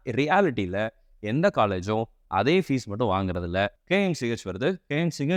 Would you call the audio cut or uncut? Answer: cut